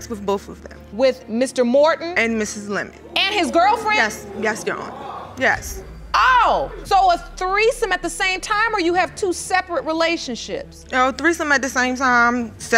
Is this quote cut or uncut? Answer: uncut